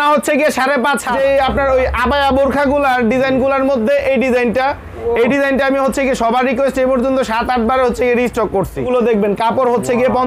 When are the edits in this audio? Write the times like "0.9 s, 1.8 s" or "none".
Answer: 1.1 s, 8.9 s